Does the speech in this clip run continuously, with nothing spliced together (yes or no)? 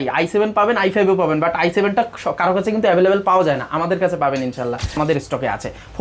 no